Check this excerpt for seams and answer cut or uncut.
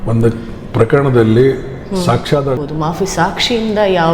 cut